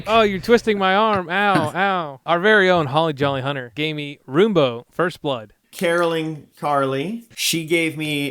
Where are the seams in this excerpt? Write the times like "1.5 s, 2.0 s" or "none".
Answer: 2.1 s, 3.7 s, 5.6 s, 7.3 s